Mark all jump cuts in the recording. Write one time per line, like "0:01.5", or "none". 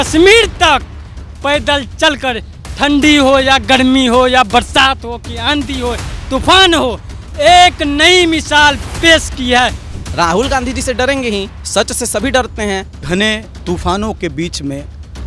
0:09.8
0:11.6
0:13.0